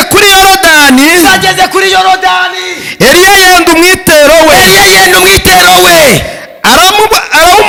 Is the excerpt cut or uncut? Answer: uncut